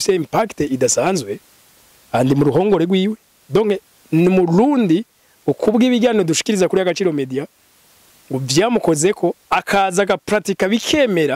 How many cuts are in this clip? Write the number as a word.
zero